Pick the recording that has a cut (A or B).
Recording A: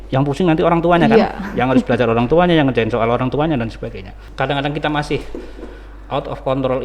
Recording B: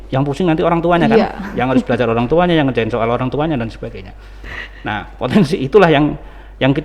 A